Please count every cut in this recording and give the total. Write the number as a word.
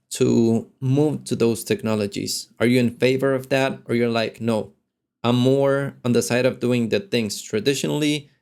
zero